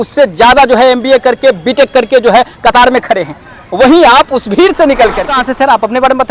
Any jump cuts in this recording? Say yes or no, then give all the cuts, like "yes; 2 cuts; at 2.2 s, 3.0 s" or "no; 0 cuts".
yes; 1 cut; at 5.3 s